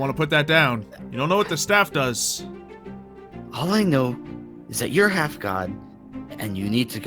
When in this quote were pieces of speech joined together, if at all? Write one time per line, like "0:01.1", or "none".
0:01.0